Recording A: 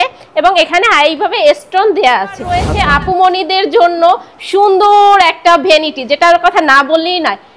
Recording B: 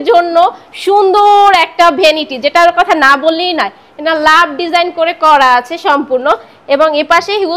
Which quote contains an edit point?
A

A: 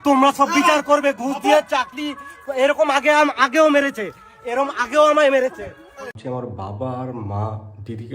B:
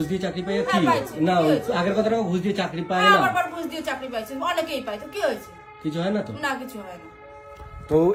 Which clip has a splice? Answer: A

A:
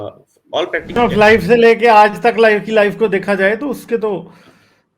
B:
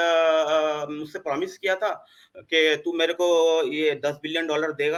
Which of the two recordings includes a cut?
A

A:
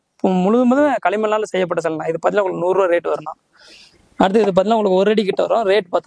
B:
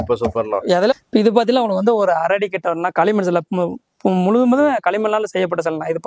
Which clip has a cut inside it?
B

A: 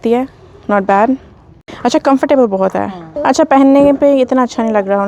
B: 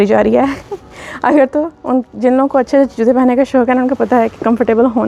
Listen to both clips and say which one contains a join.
A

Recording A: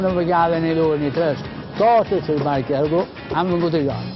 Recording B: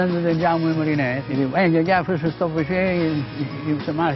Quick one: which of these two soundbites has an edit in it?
B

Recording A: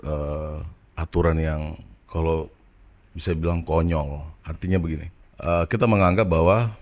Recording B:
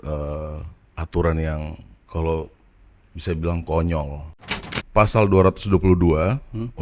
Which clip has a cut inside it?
B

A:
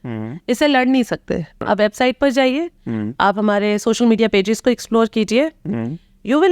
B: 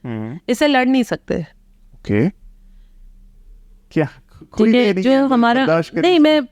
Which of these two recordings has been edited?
A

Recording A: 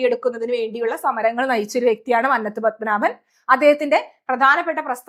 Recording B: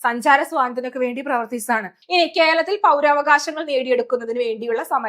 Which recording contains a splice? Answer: B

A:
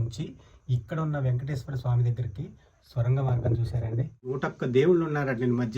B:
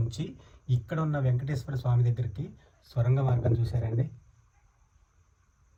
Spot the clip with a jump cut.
A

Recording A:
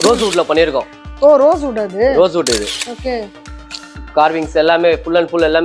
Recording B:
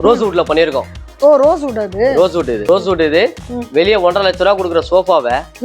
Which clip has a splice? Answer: B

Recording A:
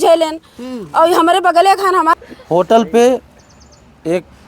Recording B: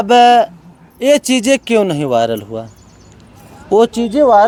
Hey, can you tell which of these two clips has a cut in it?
A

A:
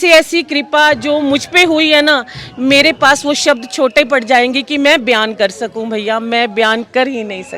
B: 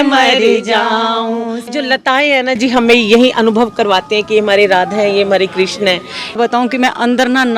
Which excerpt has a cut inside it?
B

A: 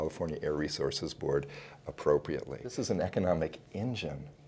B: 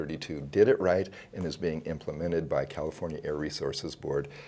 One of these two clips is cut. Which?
A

